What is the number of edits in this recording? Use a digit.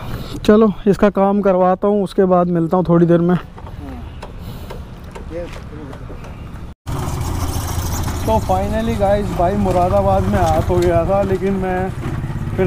1